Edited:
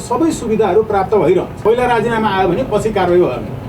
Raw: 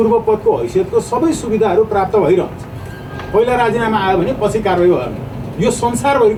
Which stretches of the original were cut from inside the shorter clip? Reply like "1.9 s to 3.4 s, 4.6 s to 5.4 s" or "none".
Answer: 2.5 s to 3.2 s